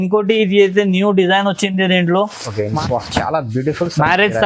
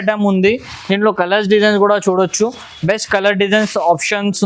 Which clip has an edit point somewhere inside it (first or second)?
first